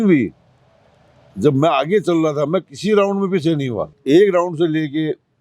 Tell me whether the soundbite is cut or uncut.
cut